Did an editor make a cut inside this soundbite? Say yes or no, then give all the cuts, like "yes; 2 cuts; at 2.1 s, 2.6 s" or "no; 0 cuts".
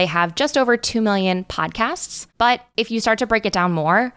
yes; 1 cut; at 2.6 s